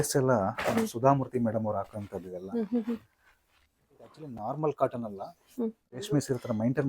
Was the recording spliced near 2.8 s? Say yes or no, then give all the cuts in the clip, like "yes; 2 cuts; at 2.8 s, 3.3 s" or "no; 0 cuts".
no; 2 cuts; at 4.2 s, 6.0 s